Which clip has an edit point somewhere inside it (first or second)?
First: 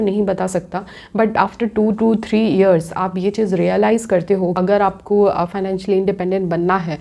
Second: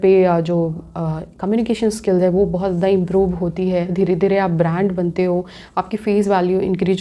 first